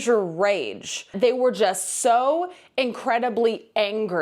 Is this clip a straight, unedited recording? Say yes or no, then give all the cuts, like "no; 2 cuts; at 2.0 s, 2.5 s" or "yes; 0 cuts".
no; 1 cut; at 1.1 s